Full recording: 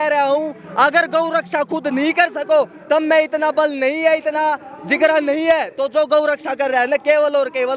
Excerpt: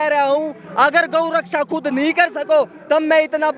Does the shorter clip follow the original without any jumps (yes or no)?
yes